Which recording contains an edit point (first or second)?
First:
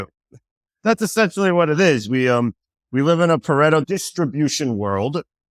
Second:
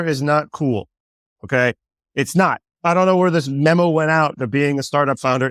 first